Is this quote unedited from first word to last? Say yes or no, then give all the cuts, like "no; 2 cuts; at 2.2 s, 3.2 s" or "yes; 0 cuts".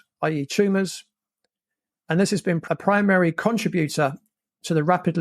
no; 1 cut; at 2.6 s